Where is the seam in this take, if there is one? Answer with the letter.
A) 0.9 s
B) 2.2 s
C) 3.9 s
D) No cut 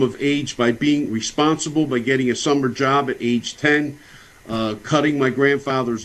A